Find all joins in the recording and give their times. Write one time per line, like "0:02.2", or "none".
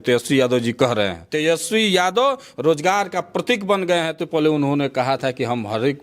0:01.2
0:04.2

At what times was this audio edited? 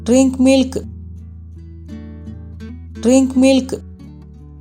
0:00.8
0:02.3
0:03.8

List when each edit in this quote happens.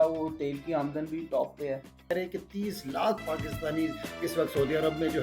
0:02.1

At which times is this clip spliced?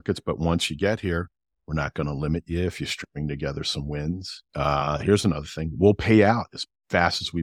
none

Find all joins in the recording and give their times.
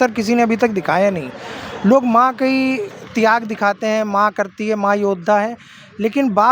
none

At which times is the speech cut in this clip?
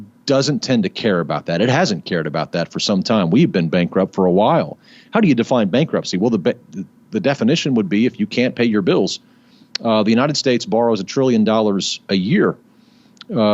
none

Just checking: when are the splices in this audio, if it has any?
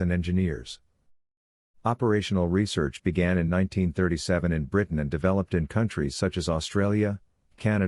none

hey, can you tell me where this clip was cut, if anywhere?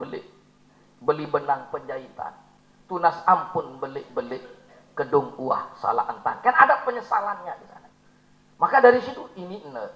none

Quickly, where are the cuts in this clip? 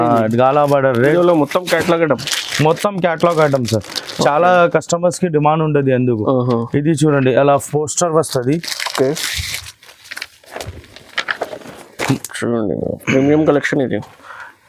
0:01.0

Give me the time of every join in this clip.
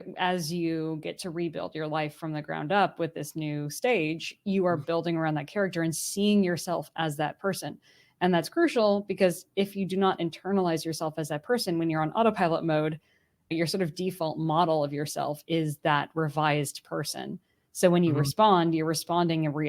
0:13.5

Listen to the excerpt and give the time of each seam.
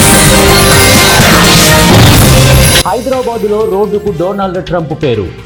none

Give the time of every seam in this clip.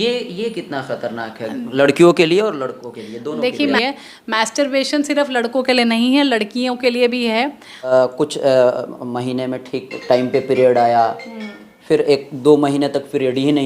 0:03.8
0:07.9

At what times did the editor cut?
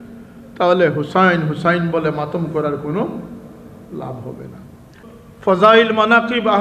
0:05.0

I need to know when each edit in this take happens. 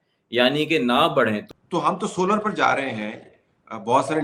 0:01.4

